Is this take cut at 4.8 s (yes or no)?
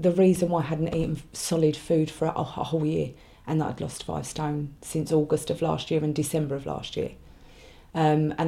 no